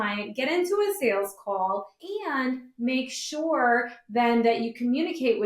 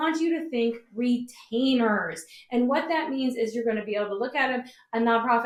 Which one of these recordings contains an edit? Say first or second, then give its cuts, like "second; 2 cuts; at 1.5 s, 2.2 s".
first; 1 cut; at 2.0 s